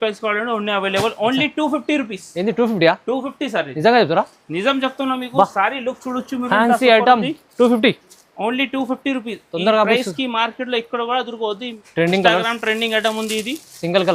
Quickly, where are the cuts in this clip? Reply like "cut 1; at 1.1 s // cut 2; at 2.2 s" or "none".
cut 1; at 11.8 s